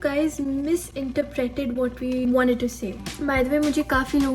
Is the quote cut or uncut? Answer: cut